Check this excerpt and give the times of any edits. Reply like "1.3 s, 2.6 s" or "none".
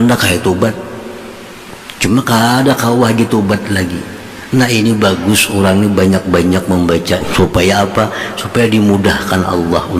7.3 s